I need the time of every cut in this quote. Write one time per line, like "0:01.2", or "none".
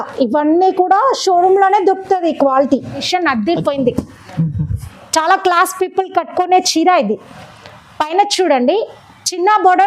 0:03.1